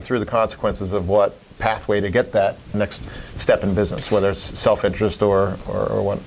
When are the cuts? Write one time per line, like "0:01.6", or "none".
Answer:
none